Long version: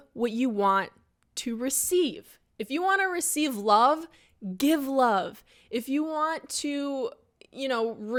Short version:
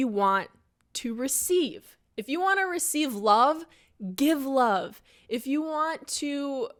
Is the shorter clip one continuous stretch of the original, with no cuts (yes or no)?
yes